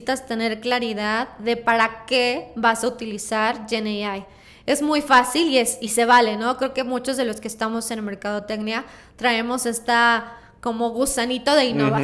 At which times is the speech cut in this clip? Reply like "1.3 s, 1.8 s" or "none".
none